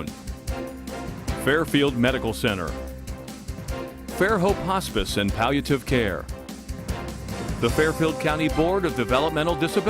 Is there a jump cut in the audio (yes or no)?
yes